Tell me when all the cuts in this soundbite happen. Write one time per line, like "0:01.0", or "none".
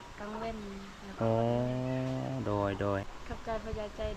0:03.1